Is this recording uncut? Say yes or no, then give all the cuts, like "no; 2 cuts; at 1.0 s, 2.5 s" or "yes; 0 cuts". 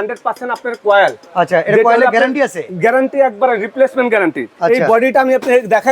no; 1 cut; at 4.5 s